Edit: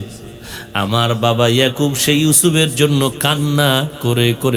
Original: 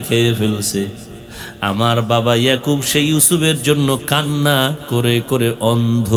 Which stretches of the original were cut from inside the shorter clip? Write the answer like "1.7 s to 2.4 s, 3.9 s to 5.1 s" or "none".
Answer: none

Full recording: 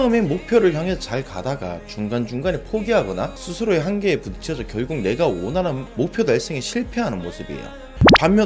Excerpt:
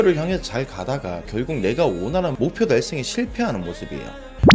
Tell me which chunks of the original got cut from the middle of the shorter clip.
1.8 s to 4.7 s, 5.8 s to 5.9 s

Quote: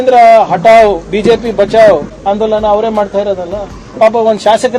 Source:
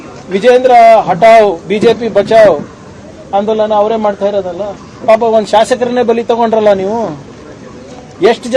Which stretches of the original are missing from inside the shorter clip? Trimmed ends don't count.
2.7 s to 3.2 s

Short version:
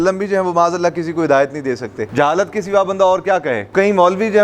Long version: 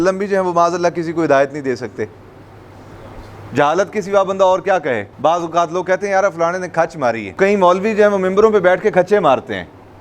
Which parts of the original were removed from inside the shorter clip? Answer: 2.0 s to 3.4 s, 5.0 s to 7.3 s

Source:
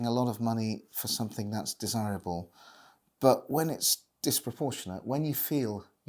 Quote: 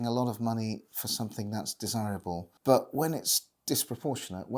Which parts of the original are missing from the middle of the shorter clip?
2.5 s to 3.1 s

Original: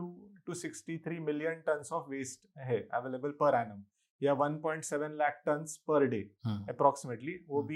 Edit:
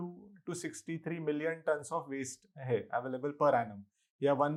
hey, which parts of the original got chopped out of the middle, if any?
none

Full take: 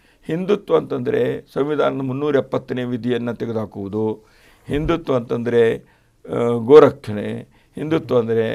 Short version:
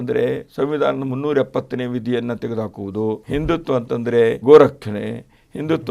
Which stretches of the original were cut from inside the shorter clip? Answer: 4.2 s to 4.6 s, 5.8 s to 6.6 s

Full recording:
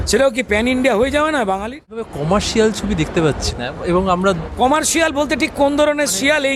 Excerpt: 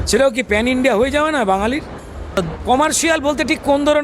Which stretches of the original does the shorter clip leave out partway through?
2.3 s to 4.2 s

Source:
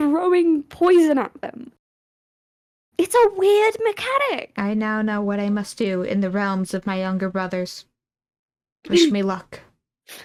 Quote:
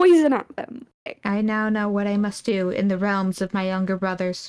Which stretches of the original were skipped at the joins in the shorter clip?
2.0 s to 4.5 s

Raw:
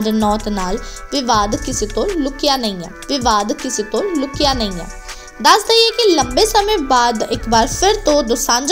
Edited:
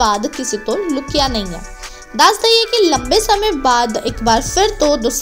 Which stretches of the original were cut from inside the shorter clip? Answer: 2.9 s to 4.8 s

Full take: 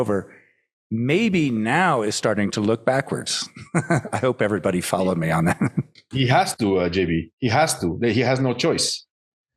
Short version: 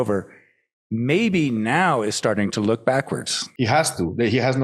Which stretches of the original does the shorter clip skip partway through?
3.5 s to 7.3 s

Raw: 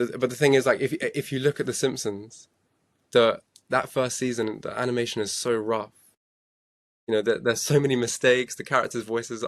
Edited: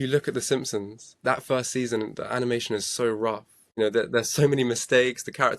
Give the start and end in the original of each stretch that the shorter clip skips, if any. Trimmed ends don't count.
2.4 s to 3.5 s, 6.0 s to 6.9 s

